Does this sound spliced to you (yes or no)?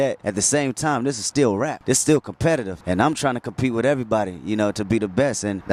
no